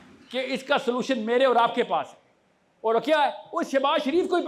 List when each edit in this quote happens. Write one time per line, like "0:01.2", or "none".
none